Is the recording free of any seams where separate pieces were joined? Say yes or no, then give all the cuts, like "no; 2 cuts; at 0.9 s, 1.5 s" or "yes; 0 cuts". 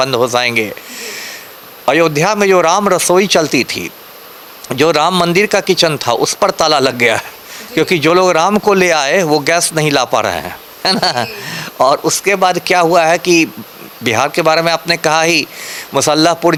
yes; 0 cuts